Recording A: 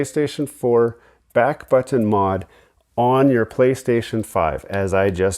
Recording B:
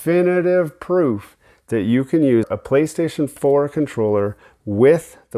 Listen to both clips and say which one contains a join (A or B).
B